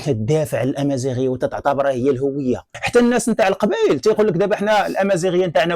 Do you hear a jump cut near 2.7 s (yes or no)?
yes